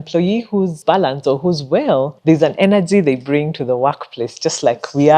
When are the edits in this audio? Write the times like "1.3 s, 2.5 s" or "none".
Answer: 0.8 s, 2.1 s